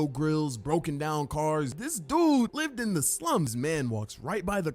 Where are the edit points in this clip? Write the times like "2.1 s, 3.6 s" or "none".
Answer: 3.5 s